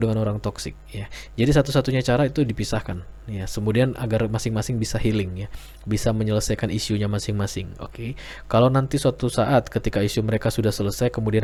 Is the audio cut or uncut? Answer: uncut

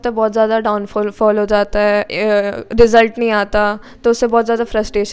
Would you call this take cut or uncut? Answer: uncut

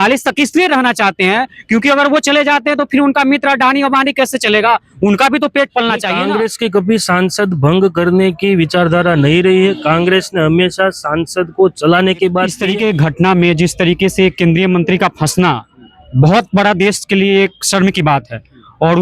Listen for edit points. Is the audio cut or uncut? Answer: cut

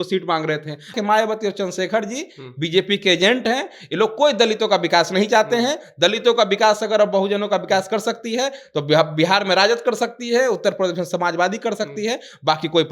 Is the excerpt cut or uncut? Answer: cut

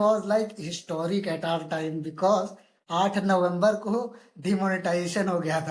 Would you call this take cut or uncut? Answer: uncut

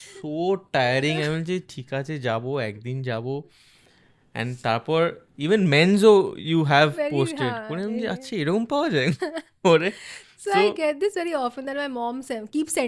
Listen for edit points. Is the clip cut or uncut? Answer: uncut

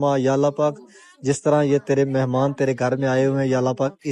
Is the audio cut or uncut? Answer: uncut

